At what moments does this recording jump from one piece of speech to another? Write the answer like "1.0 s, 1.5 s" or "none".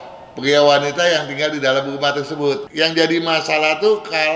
2.7 s

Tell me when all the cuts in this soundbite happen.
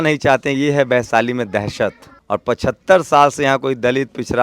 2.1 s

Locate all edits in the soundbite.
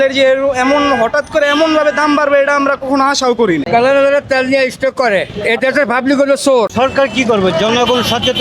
3.7 s, 6.7 s

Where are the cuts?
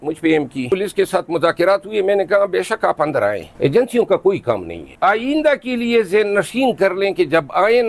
0.7 s, 4.9 s

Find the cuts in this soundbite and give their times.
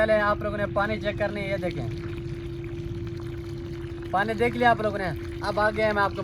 none

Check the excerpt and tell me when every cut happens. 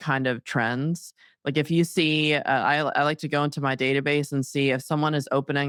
none

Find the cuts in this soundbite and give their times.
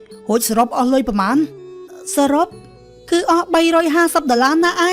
1.9 s

